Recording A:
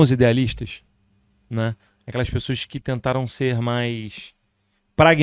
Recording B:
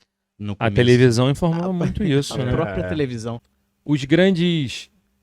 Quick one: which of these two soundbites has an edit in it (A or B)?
B